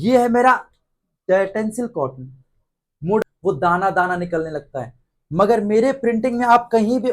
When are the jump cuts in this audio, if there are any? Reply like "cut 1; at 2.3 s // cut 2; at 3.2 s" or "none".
cut 1; at 3.2 s